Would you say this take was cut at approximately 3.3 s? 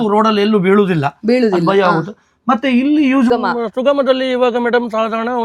yes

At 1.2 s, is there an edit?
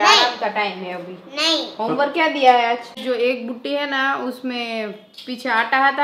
no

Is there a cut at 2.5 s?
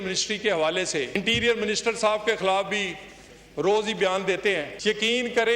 no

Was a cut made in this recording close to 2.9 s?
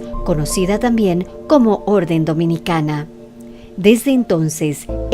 yes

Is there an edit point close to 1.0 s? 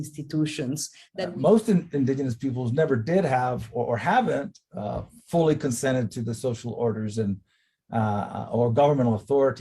yes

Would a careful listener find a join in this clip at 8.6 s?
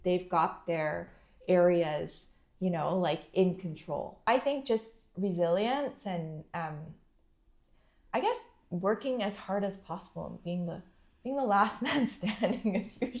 no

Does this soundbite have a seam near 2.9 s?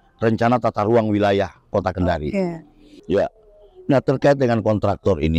yes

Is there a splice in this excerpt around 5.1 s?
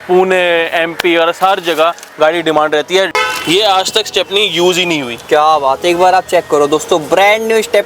no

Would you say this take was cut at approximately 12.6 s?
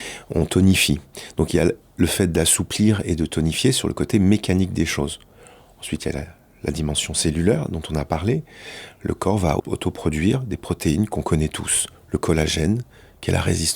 no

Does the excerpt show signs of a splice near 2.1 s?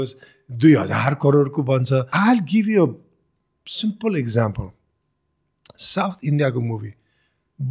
yes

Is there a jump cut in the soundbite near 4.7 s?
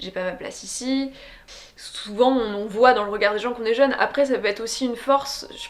no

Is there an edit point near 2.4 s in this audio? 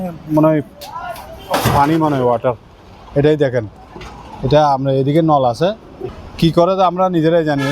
no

